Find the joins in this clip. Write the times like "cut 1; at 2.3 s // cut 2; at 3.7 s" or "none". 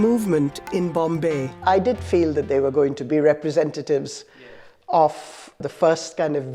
cut 1; at 1.5 s // cut 2; at 3.0 s // cut 3; at 5.6 s